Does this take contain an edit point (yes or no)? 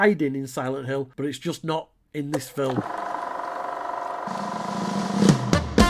yes